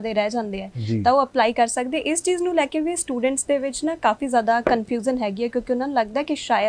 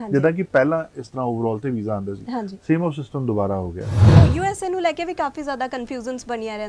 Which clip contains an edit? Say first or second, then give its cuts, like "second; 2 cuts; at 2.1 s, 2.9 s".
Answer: second; 1 cut; at 4.2 s